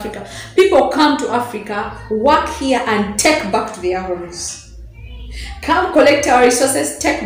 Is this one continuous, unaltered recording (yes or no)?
yes